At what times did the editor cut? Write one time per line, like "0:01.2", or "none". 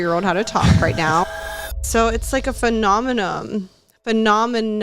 0:01.2